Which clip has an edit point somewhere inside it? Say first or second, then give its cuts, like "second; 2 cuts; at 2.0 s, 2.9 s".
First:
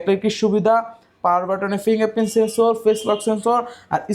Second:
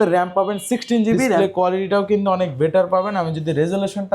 second; 1 cut; at 1.4 s